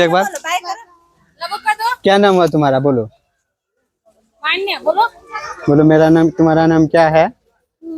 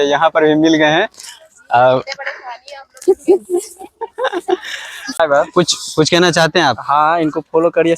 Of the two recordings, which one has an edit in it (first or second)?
second